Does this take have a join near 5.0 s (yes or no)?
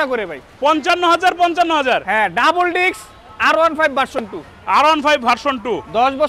no